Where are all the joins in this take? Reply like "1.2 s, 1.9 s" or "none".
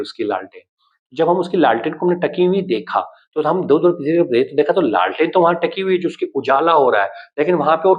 none